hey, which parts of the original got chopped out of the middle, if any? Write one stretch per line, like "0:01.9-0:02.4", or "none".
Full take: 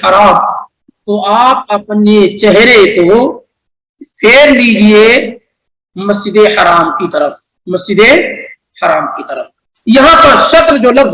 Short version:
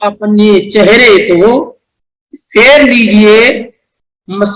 none